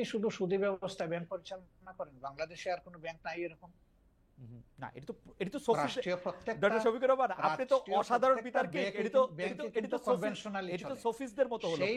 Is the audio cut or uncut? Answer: cut